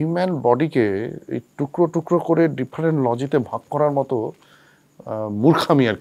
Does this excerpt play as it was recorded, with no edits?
yes; 0 cuts

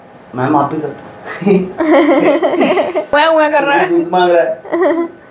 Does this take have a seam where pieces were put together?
no; 0 cuts

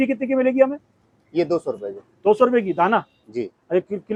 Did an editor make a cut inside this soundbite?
no; 0 cuts

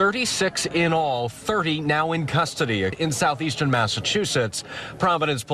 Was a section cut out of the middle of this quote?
no; 0 cuts

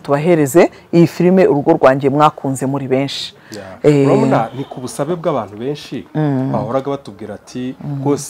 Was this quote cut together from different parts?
no; 0 cuts

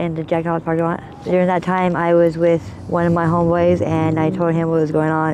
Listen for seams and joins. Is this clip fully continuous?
no; 2 cuts; at 1.2 s, 2.8 s

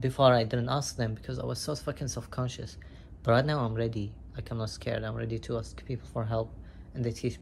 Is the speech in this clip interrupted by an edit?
no; 0 cuts

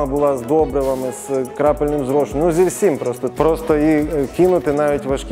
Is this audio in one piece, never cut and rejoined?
no; 1 cut; at 3.2 s

